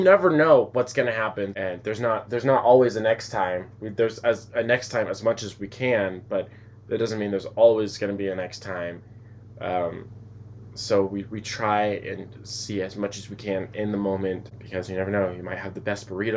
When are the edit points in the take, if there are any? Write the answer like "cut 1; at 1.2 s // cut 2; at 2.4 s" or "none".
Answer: cut 1; at 1.5 s // cut 2; at 14.5 s